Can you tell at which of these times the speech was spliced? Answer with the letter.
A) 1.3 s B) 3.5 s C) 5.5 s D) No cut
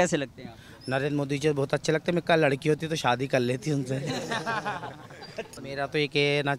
C